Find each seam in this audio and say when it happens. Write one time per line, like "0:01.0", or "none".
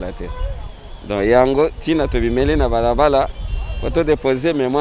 none